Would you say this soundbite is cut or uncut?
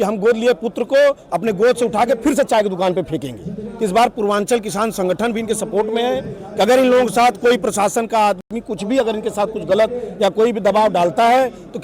uncut